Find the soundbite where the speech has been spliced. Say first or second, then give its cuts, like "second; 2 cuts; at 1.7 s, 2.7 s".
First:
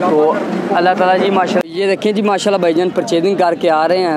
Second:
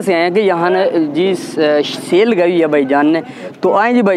first; 1 cut; at 1.6 s